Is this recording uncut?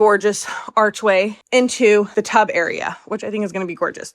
no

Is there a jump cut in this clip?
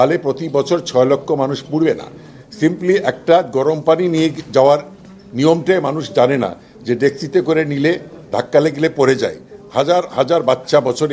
no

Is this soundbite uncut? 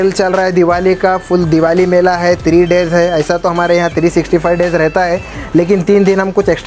yes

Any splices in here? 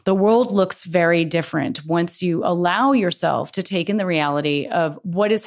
no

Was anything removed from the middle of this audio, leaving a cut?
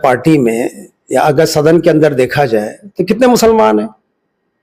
no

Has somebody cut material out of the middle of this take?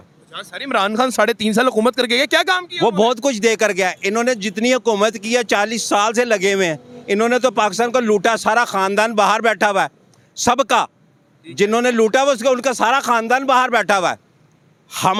no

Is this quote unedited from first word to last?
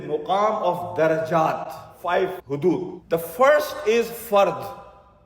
no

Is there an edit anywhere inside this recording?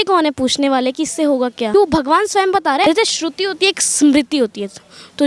yes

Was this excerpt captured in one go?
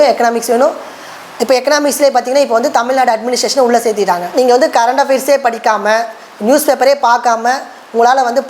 no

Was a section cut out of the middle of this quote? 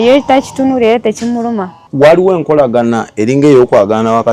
yes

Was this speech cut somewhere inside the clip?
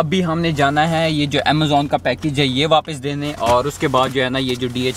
no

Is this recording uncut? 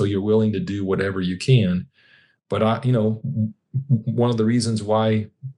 yes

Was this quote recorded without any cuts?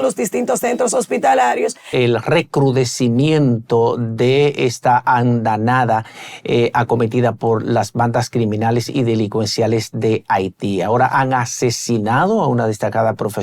no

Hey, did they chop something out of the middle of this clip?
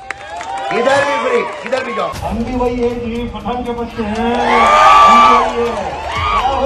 yes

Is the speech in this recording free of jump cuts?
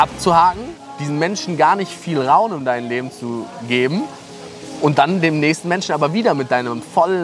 yes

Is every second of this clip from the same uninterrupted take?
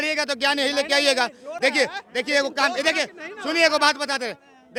yes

